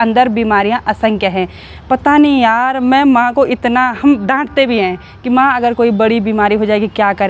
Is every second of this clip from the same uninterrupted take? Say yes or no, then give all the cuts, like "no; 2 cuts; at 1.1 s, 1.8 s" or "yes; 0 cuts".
yes; 0 cuts